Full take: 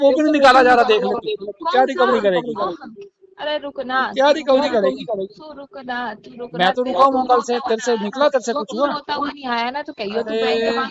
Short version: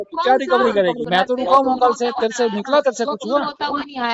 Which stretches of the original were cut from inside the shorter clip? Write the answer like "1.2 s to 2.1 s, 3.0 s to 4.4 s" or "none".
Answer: 2.5 s to 6.5 s